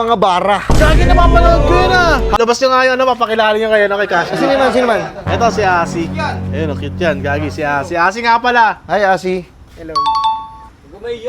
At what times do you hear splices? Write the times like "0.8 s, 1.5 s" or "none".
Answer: 2.3 s